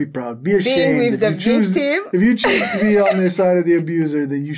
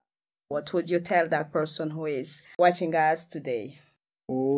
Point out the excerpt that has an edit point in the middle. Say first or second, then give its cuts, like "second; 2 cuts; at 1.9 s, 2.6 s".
second; 1 cut; at 2.4 s